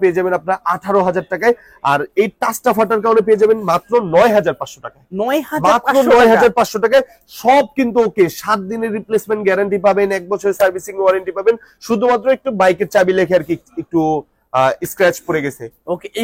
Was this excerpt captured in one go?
yes; 0 cuts

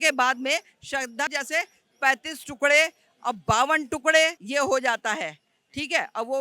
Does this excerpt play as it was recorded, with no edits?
no; 2 cuts; at 1.3 s, 4.4 s

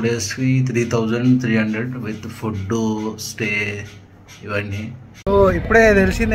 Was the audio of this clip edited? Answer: yes; 1 cut; at 5.3 s

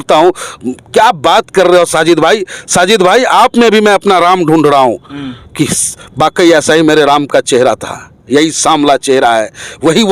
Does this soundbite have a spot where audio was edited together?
no; 0 cuts

